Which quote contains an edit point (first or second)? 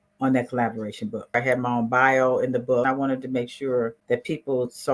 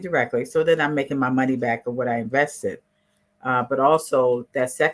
first